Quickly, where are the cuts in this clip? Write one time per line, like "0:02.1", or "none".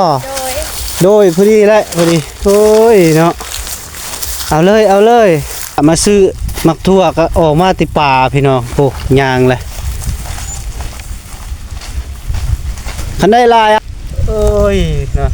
0:05.8
0:13.8